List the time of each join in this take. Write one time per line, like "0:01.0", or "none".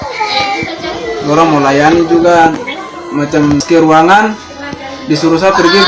0:03.6